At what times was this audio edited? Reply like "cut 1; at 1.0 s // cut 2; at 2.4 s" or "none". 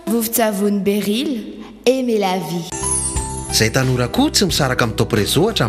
cut 1; at 2.7 s